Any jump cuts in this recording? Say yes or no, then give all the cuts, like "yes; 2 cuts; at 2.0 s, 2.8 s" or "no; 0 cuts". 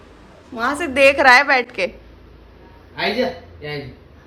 no; 0 cuts